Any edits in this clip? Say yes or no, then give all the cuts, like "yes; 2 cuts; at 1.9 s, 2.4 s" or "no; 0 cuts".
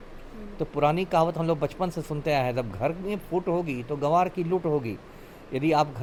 no; 0 cuts